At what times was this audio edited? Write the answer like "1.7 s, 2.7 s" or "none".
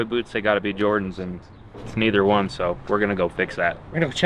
none